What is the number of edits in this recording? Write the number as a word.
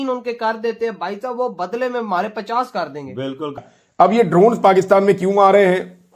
one